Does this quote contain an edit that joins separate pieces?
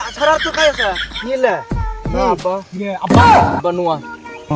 yes; 1 cut; at 1.1 s

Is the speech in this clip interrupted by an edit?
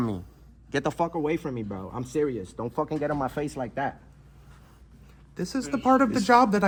no; 0 cuts

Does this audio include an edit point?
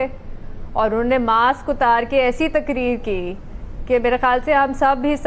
no; 0 cuts

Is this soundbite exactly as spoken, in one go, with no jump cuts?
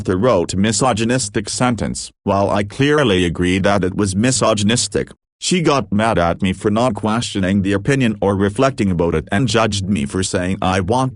yes; 0 cuts

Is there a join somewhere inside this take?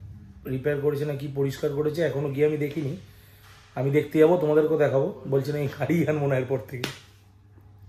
no; 0 cuts

